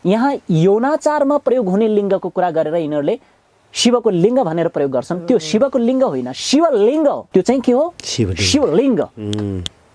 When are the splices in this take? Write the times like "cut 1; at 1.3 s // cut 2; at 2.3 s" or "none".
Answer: cut 1; at 7.2 s